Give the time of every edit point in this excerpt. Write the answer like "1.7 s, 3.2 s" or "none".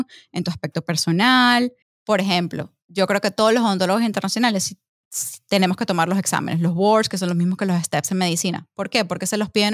1.9 s